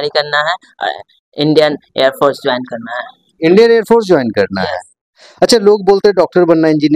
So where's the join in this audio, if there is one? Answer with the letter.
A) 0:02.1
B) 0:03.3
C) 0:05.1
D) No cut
D